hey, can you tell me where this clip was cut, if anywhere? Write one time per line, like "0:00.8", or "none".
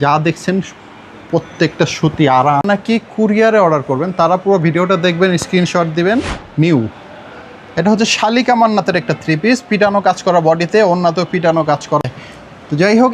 0:02.6
0:06.4
0:12.0